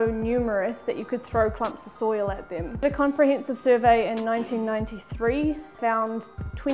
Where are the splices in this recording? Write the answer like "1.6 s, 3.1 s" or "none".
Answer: 2.8 s, 5.8 s

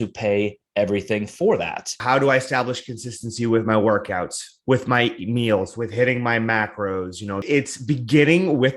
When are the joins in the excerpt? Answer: 1.9 s, 7.4 s

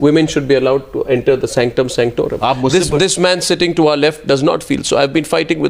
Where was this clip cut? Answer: none

